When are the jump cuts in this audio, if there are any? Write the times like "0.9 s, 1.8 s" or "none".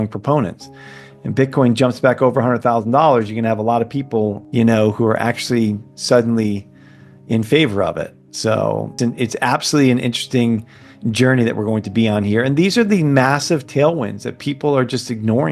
4.4 s, 9.0 s